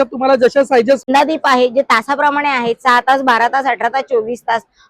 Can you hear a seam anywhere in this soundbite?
yes; 1 cut; at 1.1 s

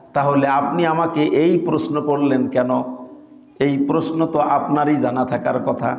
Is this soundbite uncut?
yes; 0 cuts

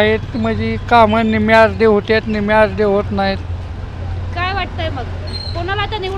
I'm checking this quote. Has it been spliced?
no; 0 cuts

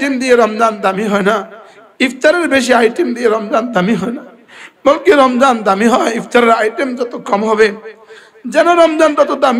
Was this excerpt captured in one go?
yes; 0 cuts

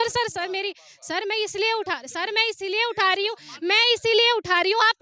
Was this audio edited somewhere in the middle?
no; 0 cuts

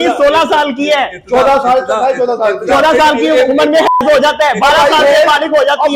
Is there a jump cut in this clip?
no; 0 cuts

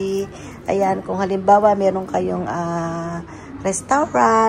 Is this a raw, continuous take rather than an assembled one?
yes; 0 cuts

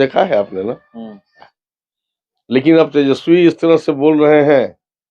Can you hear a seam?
yes; 1 cut; at 1.6 s

